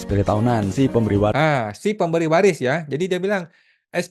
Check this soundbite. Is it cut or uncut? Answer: uncut